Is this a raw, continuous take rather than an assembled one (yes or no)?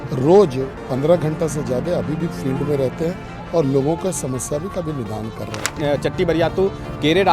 no